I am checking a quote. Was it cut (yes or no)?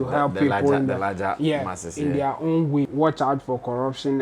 yes